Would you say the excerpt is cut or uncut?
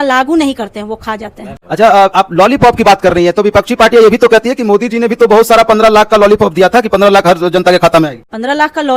uncut